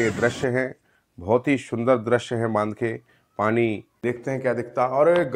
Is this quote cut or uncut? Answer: cut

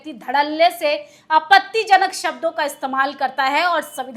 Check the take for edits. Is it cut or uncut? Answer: uncut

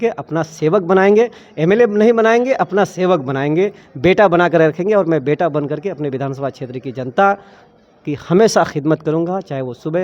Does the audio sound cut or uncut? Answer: uncut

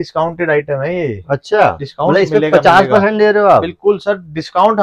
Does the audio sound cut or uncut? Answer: uncut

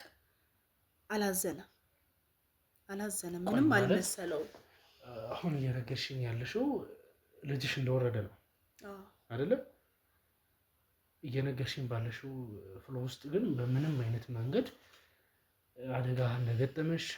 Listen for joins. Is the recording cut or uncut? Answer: uncut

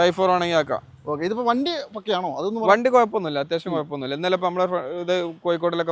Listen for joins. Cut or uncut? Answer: uncut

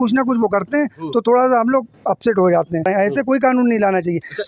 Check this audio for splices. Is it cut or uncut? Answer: cut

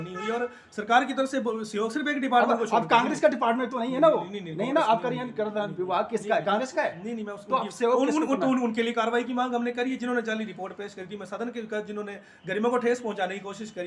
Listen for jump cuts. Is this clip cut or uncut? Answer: uncut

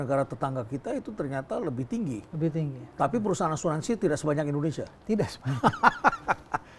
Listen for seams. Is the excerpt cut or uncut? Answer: uncut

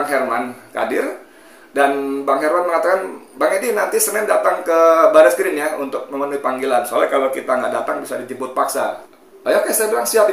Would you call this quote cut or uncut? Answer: cut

